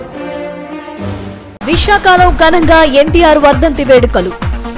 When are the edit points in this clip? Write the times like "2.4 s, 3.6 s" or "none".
none